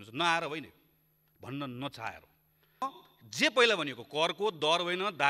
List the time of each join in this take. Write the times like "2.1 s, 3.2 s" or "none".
2.8 s